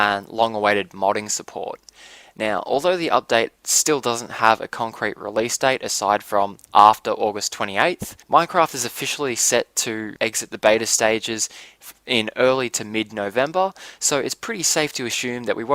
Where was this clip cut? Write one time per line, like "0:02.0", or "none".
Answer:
none

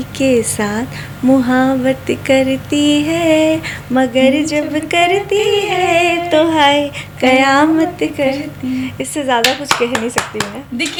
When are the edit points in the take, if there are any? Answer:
none

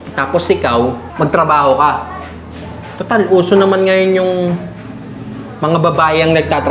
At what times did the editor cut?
0:01.0

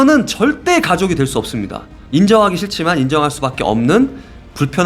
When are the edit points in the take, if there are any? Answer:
0:01.9

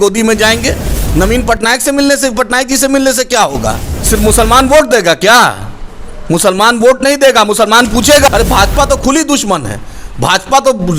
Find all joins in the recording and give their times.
0:03.9
0:08.3

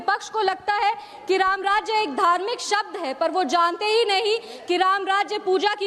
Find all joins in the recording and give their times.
none

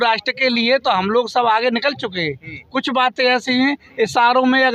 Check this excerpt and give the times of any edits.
none

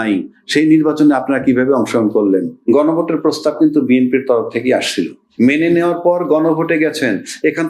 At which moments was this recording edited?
0:02.6
0:05.2

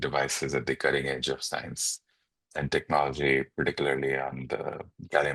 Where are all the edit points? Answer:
none

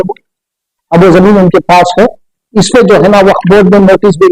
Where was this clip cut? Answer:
none

